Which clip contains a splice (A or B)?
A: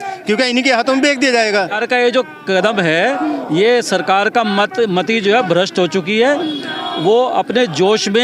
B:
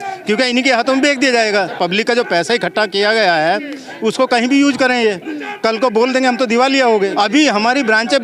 A